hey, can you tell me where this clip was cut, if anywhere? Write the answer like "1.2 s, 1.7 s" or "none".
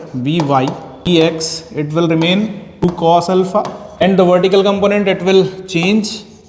1.1 s, 2.8 s, 4.0 s